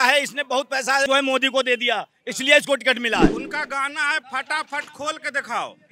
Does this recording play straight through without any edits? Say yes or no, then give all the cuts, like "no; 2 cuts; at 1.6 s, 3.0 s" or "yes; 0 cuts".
no; 2 cuts; at 1.1 s, 3.4 s